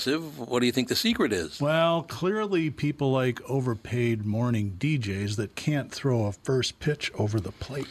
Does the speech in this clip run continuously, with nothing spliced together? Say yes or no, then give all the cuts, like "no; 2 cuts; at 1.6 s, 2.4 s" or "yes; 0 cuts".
yes; 0 cuts